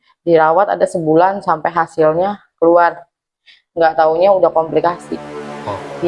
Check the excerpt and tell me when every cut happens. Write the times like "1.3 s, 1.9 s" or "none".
none